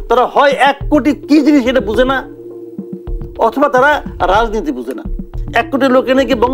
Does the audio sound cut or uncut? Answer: uncut